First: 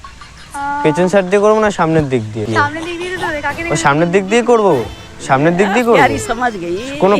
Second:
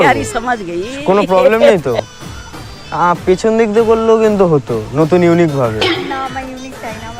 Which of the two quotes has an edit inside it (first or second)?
first